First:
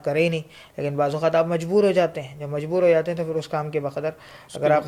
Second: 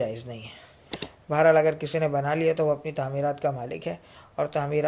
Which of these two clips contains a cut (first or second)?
second